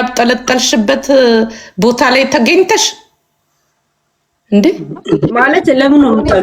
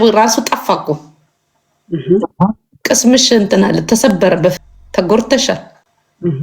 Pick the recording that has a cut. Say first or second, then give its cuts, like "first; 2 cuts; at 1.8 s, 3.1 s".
second; 1 cut; at 4.5 s